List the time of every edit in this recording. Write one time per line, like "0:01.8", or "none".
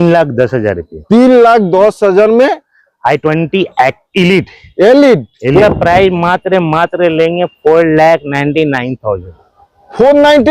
0:05.5